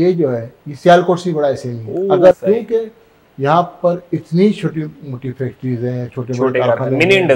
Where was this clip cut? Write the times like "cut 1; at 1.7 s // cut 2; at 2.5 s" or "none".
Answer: cut 1; at 2.3 s